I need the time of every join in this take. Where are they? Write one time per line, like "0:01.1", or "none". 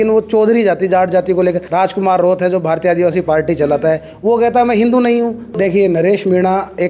0:01.6
0:05.4